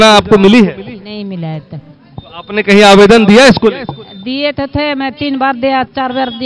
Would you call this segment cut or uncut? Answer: uncut